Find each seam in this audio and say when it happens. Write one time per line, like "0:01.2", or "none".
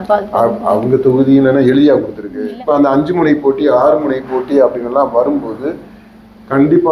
0:02.5